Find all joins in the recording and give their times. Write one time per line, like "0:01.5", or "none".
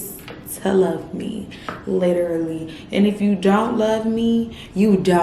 none